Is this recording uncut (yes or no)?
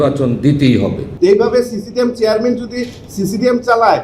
no